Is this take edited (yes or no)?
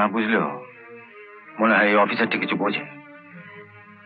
no